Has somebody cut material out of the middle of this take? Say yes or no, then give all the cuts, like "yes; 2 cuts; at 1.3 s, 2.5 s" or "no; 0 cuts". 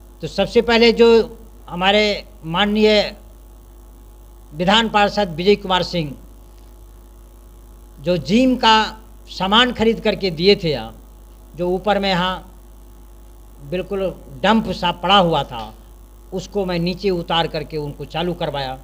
no; 0 cuts